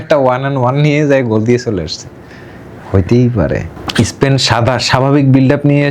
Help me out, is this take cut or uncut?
cut